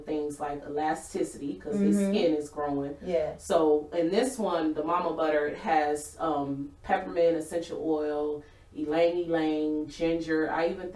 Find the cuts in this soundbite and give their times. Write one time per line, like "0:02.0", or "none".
none